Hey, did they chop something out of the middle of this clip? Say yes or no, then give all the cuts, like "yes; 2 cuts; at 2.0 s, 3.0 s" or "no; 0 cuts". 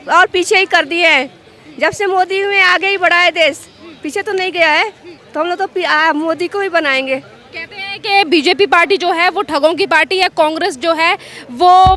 no; 0 cuts